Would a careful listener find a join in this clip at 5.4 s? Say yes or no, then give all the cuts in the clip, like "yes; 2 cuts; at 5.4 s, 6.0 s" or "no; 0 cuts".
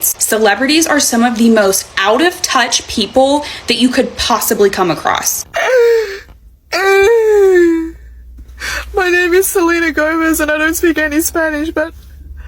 yes; 1 cut; at 5.4 s